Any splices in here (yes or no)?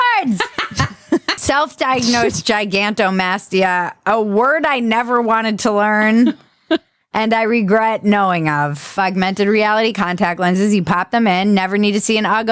yes